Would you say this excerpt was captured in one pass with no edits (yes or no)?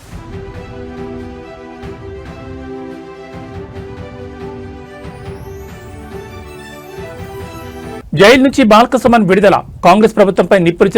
no